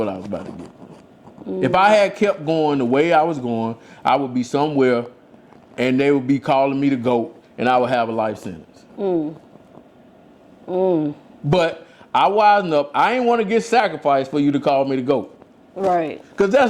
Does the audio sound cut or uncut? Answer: uncut